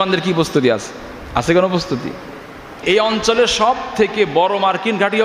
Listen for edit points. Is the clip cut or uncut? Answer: cut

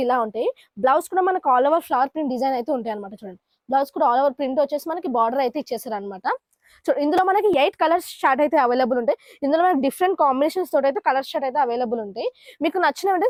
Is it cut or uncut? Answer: uncut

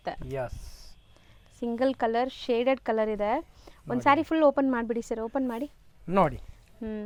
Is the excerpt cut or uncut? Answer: uncut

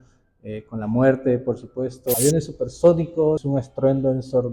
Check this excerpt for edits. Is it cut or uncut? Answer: cut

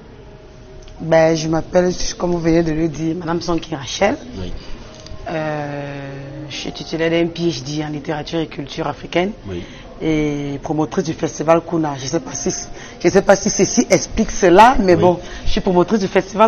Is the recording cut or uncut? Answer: uncut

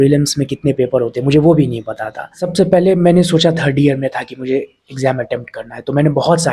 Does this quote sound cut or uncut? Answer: cut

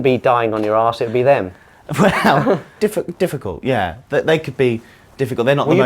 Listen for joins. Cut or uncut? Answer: cut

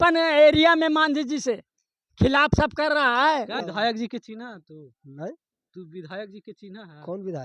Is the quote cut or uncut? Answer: cut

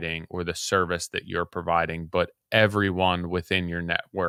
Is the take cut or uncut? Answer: uncut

